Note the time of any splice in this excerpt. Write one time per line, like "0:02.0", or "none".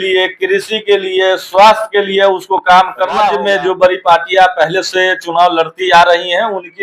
0:03.4